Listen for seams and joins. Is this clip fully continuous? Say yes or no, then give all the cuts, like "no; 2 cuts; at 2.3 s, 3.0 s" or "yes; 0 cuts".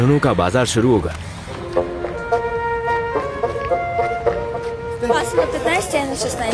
yes; 0 cuts